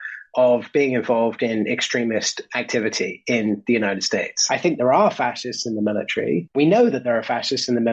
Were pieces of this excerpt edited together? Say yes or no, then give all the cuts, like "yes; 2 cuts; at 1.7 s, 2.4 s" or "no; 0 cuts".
yes; 2 cuts; at 4.3 s, 6.5 s